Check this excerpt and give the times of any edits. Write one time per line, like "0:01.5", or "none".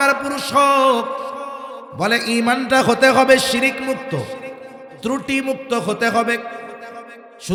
none